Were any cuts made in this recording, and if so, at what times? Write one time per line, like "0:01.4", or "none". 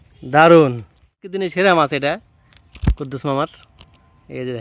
0:01.3